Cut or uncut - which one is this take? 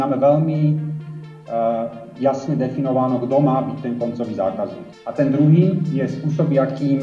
cut